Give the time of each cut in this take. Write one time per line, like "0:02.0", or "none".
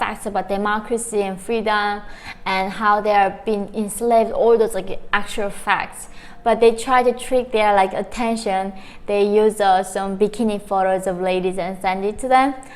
none